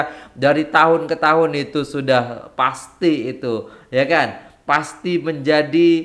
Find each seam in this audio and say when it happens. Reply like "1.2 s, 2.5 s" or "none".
none